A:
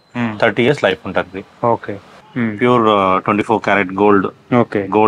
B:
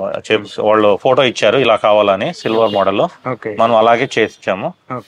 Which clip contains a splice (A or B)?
A